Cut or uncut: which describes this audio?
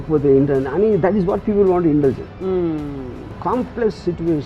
cut